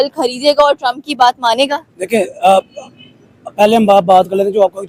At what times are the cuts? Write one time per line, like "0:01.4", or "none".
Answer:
none